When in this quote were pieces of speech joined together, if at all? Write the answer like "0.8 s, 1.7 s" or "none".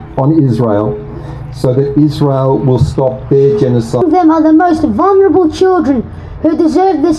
4.0 s